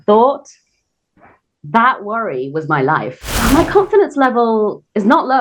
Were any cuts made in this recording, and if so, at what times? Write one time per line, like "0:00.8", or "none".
0:03.3